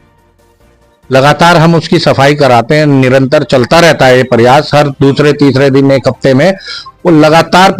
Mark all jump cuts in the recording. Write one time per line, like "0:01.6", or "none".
none